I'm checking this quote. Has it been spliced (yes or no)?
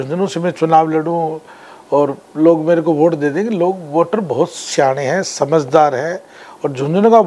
no